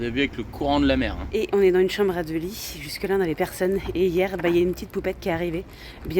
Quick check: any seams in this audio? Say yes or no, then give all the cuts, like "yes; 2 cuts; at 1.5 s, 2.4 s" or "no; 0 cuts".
yes; 1 cut; at 1.2 s